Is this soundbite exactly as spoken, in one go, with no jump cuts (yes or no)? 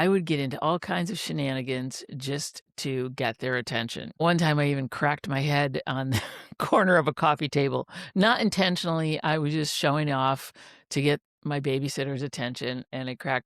no